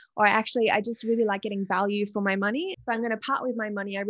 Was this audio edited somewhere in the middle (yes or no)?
yes